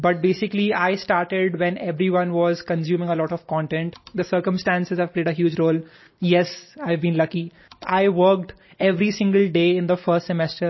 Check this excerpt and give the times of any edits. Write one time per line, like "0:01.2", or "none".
0:04.0
0:07.8